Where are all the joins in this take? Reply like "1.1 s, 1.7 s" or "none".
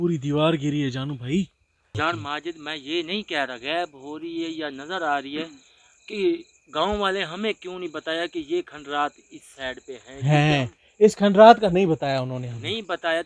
1.9 s